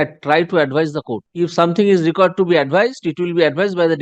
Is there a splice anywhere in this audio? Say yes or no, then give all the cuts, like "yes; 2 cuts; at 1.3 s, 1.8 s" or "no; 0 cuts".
yes; 1 cut; at 1.2 s